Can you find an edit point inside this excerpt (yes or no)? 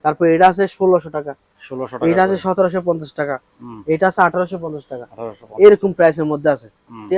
no